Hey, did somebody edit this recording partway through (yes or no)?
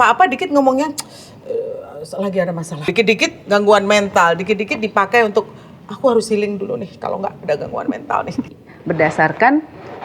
yes